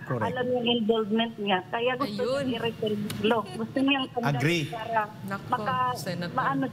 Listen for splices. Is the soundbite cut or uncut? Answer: uncut